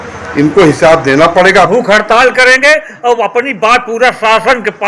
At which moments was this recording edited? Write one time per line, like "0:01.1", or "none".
0:01.7